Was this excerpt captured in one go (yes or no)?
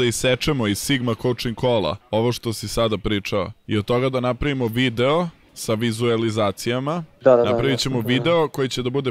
no